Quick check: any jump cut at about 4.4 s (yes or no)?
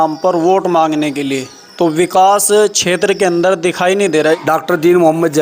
yes